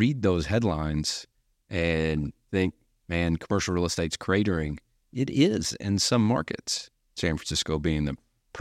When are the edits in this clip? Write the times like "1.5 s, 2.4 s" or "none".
2.4 s, 7.3 s